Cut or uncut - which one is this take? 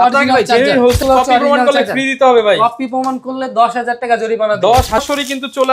cut